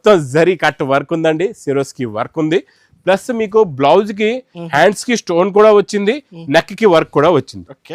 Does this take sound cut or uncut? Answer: uncut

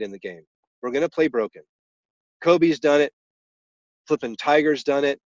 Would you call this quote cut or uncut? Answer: uncut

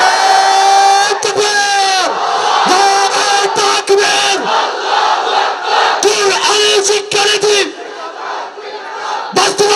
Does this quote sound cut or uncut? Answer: uncut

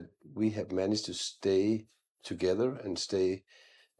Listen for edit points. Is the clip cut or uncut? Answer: uncut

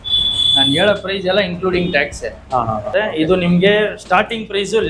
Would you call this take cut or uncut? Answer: uncut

